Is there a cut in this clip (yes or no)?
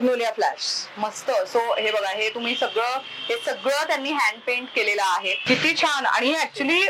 yes